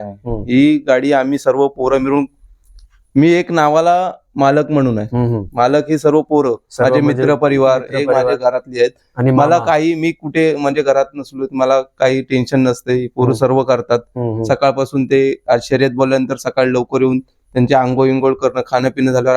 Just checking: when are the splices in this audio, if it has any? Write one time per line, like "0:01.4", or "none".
none